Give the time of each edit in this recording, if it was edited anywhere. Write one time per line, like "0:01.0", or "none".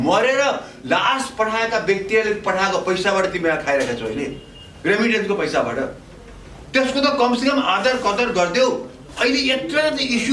0:09.1